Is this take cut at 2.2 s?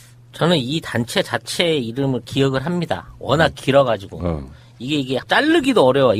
yes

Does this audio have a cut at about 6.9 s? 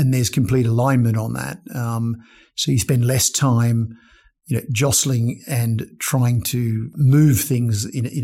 yes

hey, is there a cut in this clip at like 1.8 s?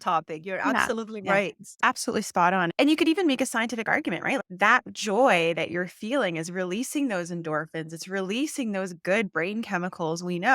yes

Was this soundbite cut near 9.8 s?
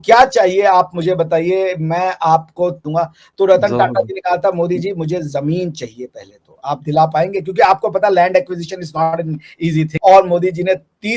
yes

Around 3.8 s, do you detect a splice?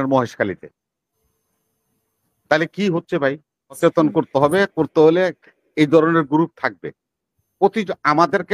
yes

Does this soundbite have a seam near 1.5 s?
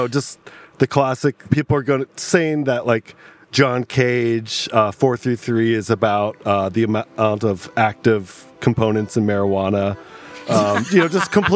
yes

